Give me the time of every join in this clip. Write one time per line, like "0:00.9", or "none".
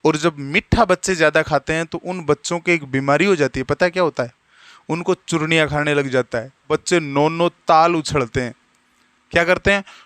0:06.7